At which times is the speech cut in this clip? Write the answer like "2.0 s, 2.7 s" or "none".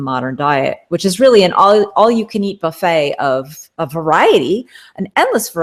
none